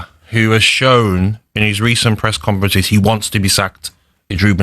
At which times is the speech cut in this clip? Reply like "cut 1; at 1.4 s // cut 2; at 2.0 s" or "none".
none